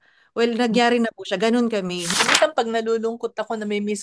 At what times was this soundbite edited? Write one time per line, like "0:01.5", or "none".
0:02.0